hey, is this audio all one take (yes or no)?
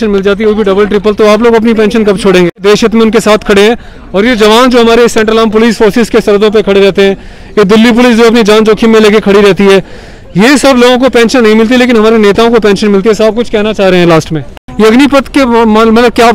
no